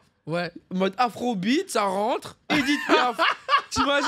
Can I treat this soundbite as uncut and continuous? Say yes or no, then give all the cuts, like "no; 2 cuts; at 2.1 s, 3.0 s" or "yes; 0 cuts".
yes; 0 cuts